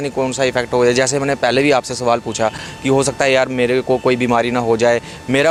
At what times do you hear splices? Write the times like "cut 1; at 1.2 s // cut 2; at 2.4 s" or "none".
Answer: none